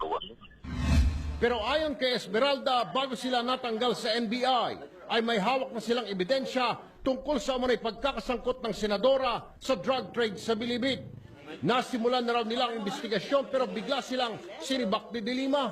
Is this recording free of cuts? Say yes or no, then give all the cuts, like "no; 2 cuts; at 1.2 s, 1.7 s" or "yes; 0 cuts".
no; 1 cut; at 7.8 s